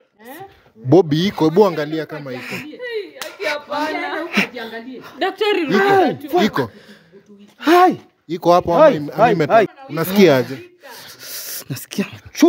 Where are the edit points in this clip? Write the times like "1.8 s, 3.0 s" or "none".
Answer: 9.7 s